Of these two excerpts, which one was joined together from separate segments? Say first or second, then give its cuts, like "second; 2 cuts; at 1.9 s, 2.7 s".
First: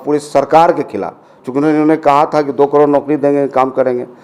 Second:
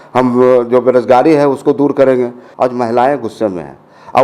second; 1 cut; at 2.4 s